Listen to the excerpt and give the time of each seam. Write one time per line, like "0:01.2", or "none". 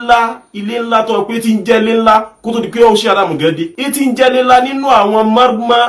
0:03.8

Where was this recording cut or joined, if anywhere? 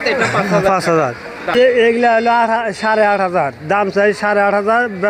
0:01.5

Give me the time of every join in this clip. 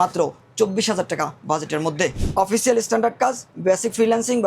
0:02.2

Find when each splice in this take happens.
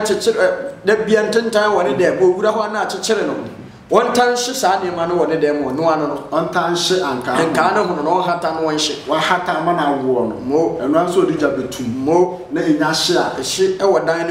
none

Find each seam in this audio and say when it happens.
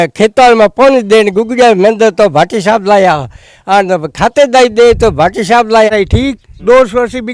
0:05.9

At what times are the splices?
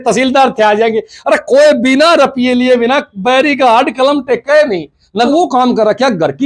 0:05.3

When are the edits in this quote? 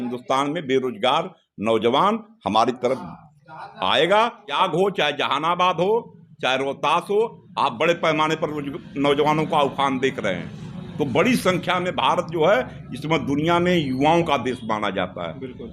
0:04.6

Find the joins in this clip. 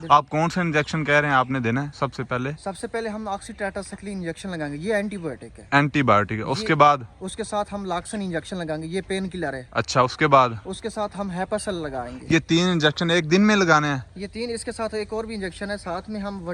none

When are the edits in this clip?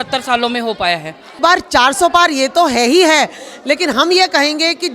0:01.3

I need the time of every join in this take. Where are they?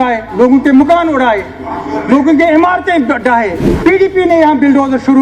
0:03.6

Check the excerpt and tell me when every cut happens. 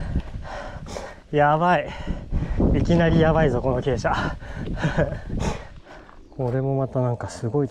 0:05.8

